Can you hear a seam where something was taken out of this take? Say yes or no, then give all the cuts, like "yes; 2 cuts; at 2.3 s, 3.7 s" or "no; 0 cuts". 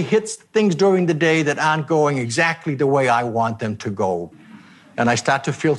yes; 1 cut; at 4.3 s